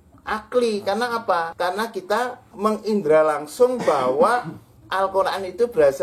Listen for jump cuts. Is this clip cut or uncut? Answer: cut